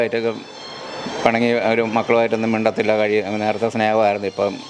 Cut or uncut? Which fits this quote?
uncut